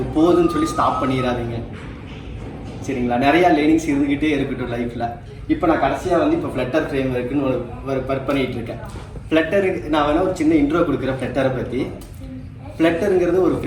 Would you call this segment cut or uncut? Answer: uncut